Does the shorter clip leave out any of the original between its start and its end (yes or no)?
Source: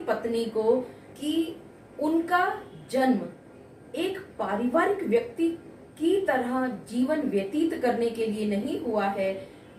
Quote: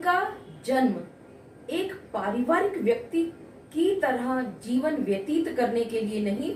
no